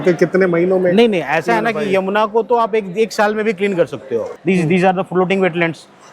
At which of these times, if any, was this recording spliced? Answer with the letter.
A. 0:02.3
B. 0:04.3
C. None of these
B